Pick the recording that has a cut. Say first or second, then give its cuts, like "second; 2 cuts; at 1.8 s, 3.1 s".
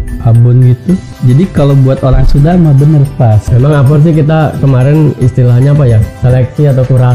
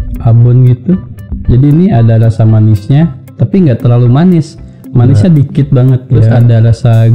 first; 2 cuts; at 1.1 s, 3.4 s